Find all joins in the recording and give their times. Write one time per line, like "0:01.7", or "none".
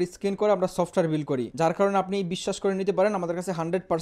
0:01.5